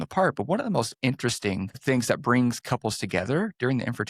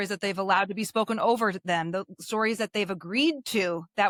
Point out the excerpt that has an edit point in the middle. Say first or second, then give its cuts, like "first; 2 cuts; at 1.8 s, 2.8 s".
first; 1 cut; at 1.8 s